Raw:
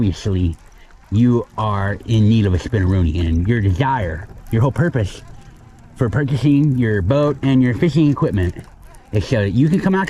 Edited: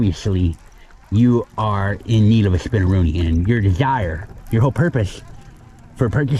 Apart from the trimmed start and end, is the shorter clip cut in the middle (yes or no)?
no